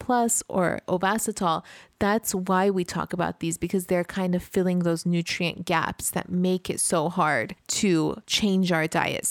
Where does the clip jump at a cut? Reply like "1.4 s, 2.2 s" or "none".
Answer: 8.3 s